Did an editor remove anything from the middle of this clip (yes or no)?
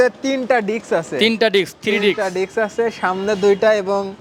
no